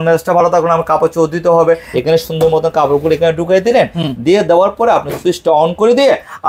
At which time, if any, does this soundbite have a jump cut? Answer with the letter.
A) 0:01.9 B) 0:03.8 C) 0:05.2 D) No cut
A